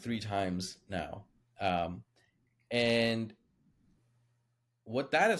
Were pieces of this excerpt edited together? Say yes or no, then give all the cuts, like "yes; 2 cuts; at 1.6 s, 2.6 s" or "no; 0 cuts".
no; 0 cuts